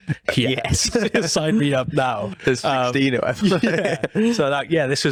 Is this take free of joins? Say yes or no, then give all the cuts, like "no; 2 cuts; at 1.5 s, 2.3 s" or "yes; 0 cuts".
yes; 0 cuts